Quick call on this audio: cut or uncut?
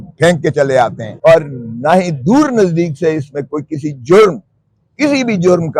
cut